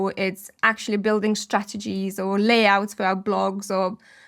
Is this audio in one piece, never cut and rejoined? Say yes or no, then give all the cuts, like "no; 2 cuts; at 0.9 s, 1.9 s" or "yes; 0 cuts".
yes; 0 cuts